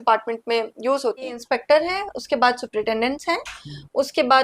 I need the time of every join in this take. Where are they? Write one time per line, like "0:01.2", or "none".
0:01.4